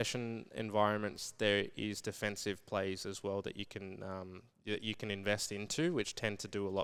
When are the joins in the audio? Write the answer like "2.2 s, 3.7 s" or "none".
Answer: none